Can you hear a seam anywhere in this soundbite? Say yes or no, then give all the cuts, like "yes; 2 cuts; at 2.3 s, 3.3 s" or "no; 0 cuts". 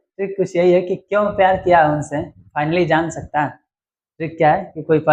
no; 0 cuts